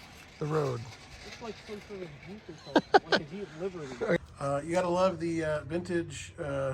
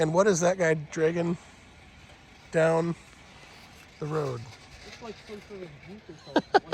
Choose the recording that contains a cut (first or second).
first